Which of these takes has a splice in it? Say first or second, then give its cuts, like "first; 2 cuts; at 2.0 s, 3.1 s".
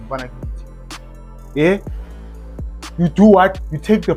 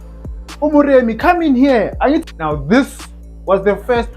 second; 1 cut; at 2.3 s